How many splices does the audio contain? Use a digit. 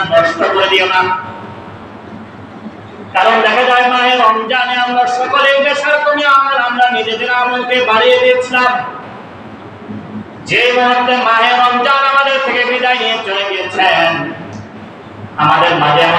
0